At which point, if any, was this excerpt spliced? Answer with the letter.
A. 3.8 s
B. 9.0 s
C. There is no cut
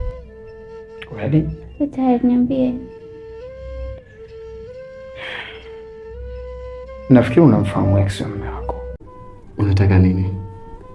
B